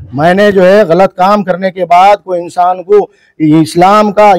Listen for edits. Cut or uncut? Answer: uncut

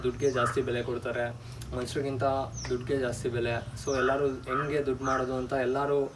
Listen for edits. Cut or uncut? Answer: uncut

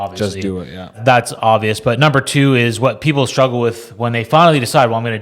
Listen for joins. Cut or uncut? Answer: cut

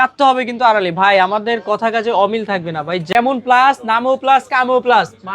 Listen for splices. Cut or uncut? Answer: cut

